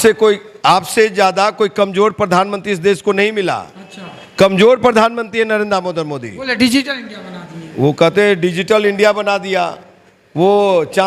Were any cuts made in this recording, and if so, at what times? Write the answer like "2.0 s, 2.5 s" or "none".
none